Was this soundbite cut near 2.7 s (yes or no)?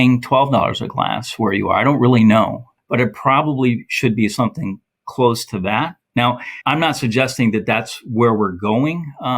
yes